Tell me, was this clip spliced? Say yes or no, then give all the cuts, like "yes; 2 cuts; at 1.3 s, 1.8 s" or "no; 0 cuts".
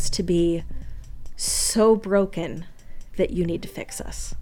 no; 0 cuts